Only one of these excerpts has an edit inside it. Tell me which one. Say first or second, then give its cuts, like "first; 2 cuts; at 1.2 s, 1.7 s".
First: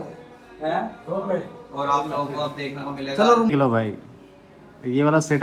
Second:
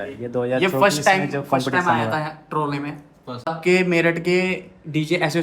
second; 1 cut; at 3.4 s